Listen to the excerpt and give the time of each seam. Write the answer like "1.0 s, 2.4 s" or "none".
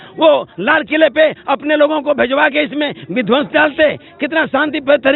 none